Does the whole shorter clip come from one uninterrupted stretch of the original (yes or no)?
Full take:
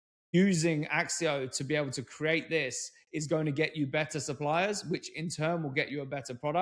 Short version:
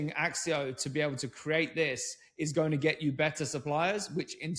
yes